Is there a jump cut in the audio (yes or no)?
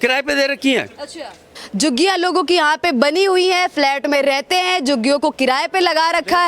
yes